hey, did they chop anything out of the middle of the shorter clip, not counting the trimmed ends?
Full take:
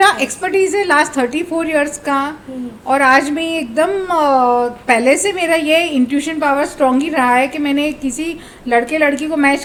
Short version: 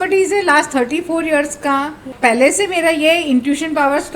yes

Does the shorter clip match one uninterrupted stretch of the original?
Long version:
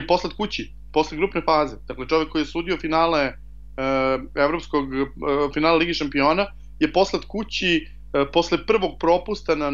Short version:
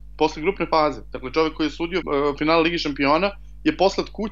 no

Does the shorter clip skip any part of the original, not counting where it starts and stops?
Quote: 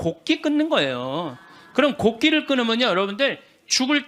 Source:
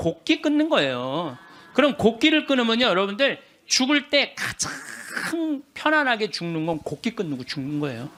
no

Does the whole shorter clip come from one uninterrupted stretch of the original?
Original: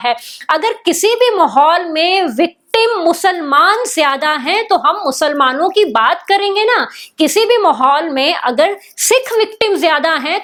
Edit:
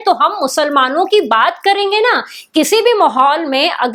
yes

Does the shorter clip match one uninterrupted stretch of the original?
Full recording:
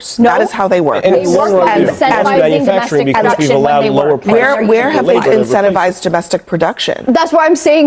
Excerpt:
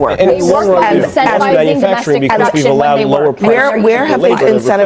yes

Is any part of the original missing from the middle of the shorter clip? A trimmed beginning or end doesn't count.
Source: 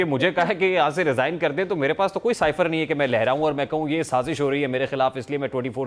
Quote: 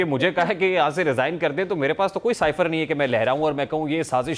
no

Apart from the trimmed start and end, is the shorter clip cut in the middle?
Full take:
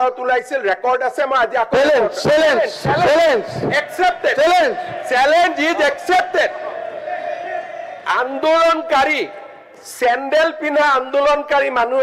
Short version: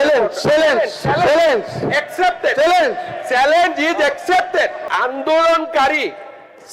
yes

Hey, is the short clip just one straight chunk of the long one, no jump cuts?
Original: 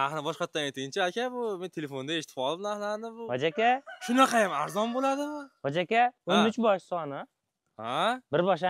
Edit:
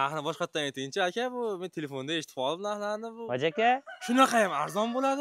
yes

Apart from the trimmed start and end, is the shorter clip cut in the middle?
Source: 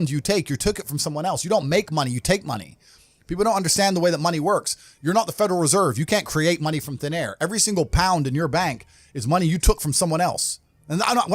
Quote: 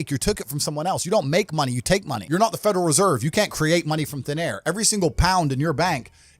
yes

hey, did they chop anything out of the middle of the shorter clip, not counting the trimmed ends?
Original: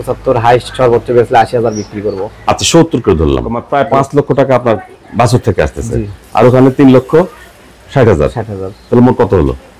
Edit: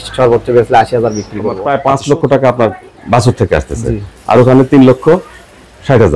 yes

